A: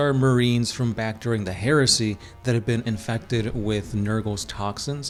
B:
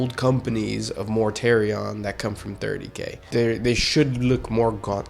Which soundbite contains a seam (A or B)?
B